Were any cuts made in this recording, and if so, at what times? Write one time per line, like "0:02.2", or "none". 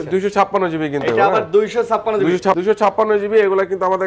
0:02.6